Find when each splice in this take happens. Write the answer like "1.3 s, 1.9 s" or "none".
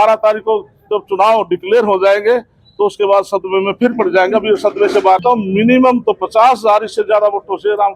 5.2 s